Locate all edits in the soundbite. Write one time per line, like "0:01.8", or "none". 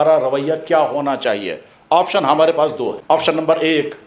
0:03.0

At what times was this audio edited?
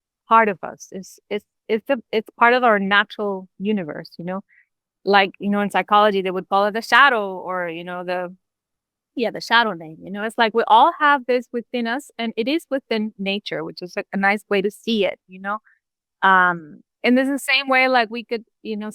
none

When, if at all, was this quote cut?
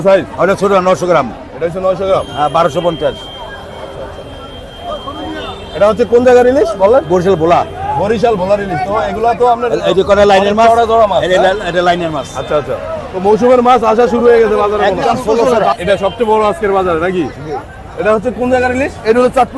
0:15.4

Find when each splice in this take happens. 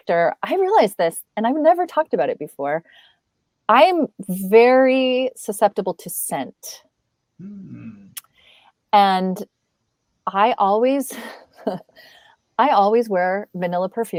none

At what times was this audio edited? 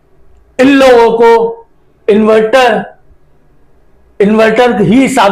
none

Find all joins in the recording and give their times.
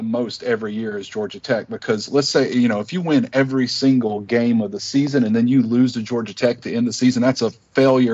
none

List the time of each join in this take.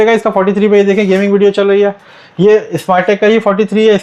none

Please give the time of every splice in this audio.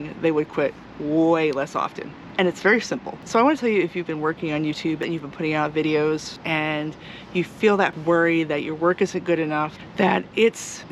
0:03.2
0:05.0
0:06.4
0:08.0
0:09.8

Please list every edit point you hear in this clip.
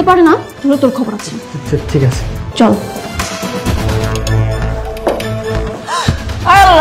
0:02.4
0:03.8
0:05.8

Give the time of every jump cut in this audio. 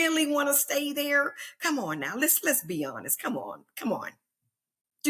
none

